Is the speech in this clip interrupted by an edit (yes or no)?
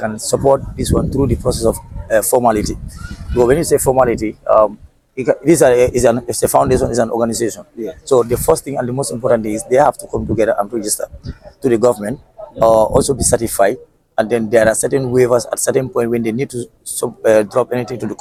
no